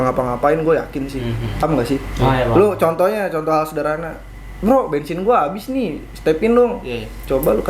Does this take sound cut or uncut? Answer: cut